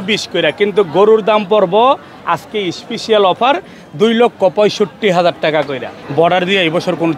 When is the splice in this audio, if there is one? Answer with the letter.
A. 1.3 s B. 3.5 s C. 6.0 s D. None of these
C